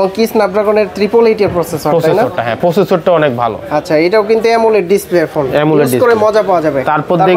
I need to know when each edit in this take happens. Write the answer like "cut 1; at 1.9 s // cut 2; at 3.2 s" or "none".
none